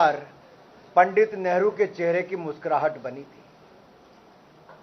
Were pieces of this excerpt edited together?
no; 0 cuts

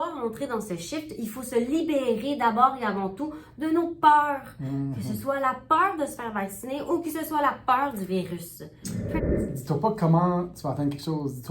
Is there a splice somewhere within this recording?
yes; 1 cut; at 9.2 s

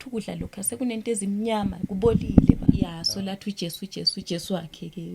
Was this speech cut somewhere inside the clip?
yes; 1 cut; at 3.0 s

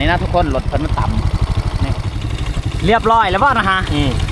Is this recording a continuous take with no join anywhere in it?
no; 1 cut; at 2.3 s

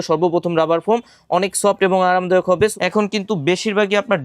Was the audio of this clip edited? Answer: yes; 1 cut; at 2.8 s

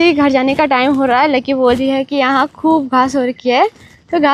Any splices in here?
no; 0 cuts

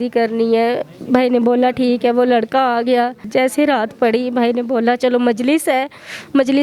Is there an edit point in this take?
yes; 1 cut; at 3.3 s

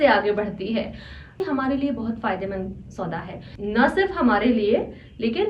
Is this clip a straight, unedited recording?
no; 1 cut; at 1.4 s

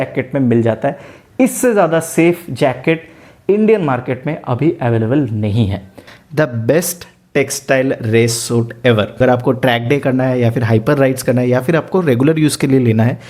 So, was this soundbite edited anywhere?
yes; 2 cuts; at 6.0 s, 9.1 s

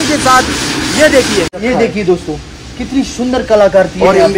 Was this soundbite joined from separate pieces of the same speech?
yes; 1 cut; at 1.6 s

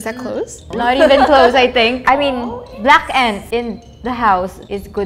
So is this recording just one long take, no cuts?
no; 1 cut; at 2.0 s

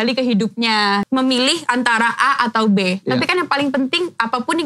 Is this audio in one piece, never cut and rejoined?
no; 1 cut; at 1.1 s

